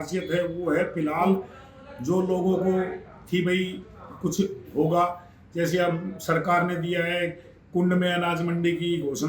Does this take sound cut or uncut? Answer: uncut